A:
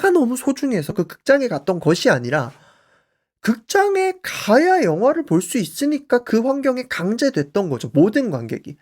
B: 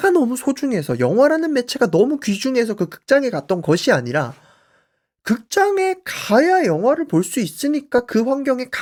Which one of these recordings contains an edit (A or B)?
A